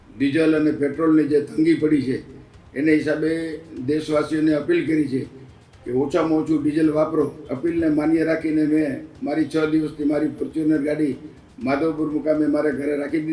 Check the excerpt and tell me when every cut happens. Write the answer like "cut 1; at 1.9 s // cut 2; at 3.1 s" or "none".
cut 1; at 7.4 s